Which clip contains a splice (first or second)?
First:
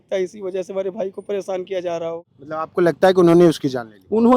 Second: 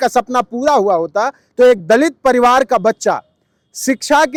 first